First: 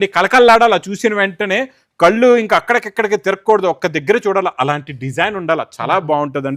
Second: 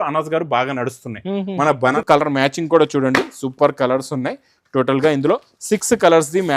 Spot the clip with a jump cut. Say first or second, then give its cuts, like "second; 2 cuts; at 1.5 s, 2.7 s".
second; 1 cut; at 2.0 s